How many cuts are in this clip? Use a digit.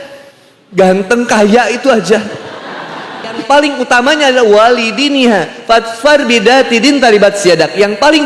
1